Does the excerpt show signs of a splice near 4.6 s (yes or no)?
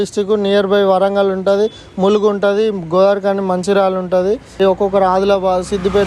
yes